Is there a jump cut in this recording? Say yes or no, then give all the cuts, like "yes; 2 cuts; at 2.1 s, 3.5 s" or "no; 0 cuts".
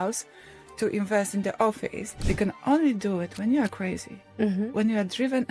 yes; 1 cut; at 2.2 s